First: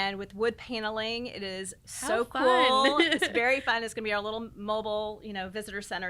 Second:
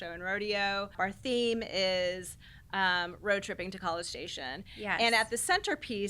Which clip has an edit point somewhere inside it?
second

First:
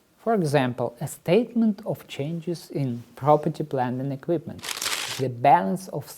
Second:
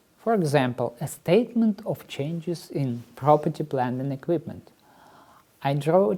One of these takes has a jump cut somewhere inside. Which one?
first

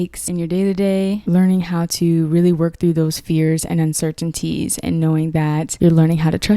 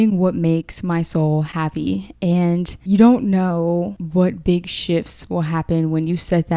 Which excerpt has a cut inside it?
first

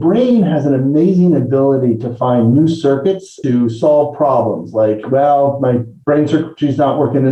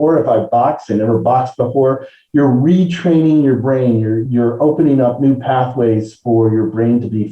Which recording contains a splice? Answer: second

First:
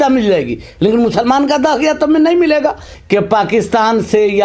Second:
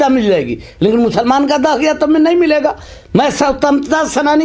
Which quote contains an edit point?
first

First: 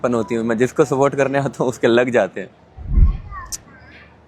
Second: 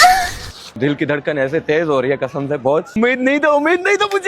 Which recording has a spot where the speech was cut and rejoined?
second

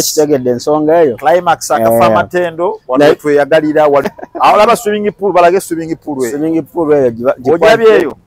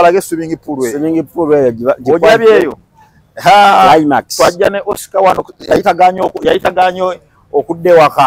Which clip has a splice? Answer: first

